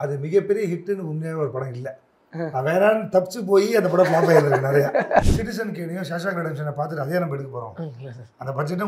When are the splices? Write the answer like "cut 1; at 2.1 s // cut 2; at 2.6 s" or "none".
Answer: cut 1; at 5.3 s